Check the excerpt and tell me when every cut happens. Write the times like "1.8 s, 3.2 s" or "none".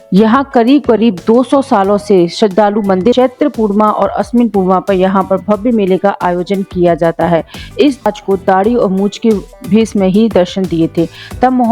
3.1 s, 8.1 s